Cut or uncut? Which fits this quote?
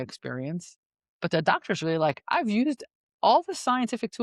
uncut